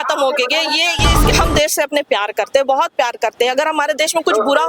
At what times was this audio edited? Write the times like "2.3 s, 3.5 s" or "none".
1.3 s